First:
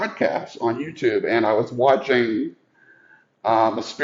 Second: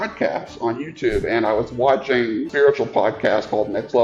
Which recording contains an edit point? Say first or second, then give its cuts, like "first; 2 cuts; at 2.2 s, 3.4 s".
second; 1 cut; at 2.5 s